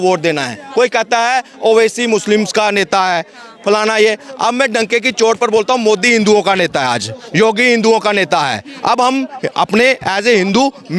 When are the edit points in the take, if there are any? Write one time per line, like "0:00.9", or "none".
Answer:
none